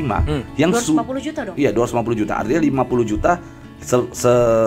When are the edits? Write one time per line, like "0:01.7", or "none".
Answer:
none